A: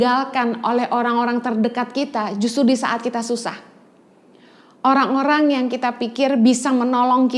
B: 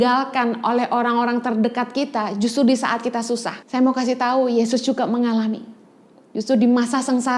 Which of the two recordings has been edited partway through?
B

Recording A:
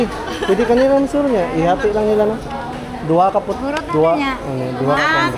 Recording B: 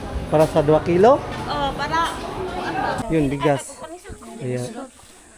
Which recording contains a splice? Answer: B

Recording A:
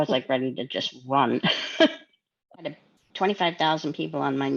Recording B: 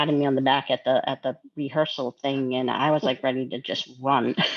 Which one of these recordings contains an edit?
A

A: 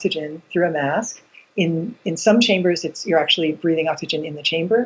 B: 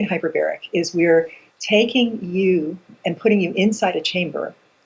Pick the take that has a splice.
B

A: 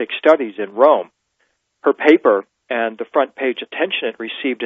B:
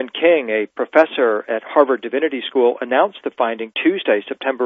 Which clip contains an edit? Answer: A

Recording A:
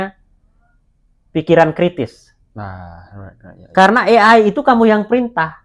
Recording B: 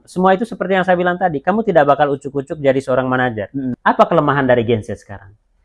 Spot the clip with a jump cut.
B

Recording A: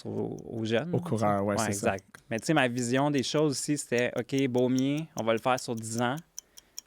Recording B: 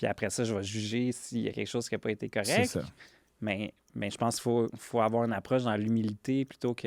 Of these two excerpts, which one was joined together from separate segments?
A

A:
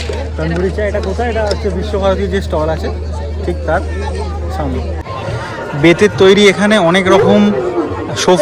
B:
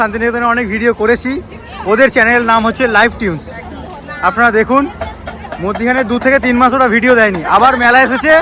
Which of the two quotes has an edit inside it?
A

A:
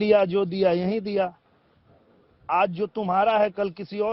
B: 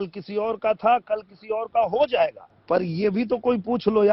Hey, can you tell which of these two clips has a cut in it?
B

